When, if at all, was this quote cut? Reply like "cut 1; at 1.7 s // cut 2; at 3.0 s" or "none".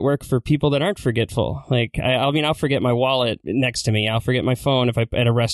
cut 1; at 3.4 s